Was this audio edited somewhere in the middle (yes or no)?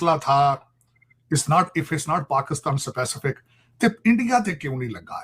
no